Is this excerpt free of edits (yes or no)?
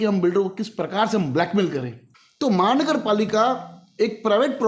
no